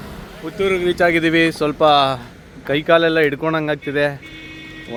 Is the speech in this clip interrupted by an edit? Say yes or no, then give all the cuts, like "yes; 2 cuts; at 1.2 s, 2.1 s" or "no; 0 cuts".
no; 0 cuts